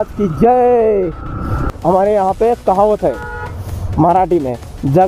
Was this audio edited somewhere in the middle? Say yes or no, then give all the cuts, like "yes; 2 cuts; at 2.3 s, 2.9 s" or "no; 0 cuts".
yes; 1 cut; at 1.7 s